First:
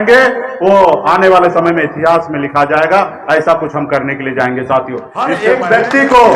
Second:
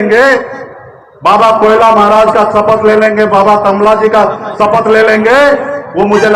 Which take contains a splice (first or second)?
first